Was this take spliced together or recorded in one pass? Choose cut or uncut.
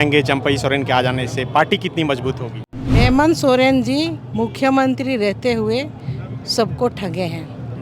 cut